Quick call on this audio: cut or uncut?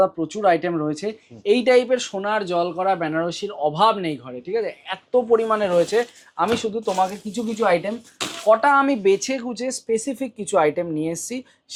uncut